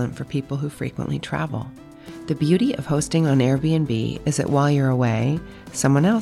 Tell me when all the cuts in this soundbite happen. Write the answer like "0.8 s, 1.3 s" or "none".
none